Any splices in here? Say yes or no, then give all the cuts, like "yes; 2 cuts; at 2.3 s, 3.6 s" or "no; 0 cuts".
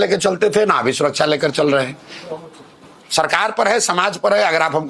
no; 0 cuts